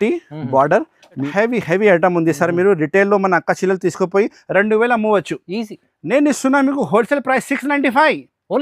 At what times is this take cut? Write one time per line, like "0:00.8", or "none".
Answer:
0:01.2